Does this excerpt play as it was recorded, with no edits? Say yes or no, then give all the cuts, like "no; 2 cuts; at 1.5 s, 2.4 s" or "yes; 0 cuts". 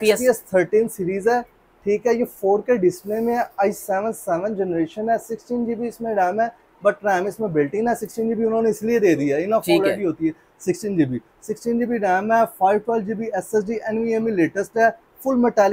yes; 0 cuts